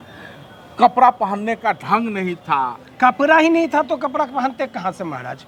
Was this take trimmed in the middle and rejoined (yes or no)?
no